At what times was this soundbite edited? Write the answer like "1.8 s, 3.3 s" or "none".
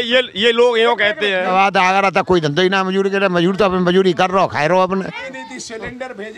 1.5 s, 5.3 s

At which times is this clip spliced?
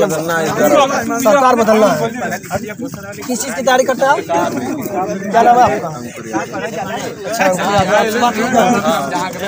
none

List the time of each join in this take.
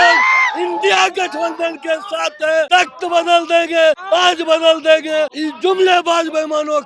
2.7 s, 4.0 s, 5.4 s

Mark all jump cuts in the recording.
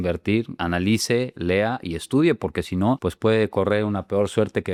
none

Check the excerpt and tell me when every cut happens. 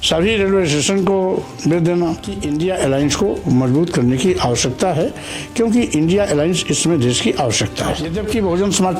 2.3 s, 8.1 s

